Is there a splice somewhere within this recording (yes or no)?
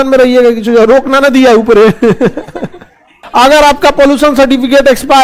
yes